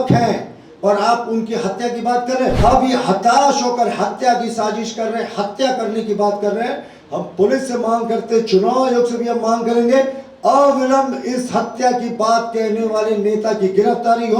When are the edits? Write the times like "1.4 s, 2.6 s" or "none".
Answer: 2.6 s